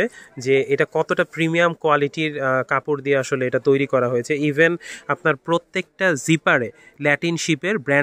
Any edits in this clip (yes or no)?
no